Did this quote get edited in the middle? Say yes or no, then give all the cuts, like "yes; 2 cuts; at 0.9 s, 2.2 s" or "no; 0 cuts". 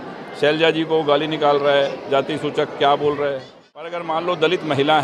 yes; 1 cut; at 3.9 s